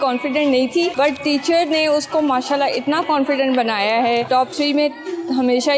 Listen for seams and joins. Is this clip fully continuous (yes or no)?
no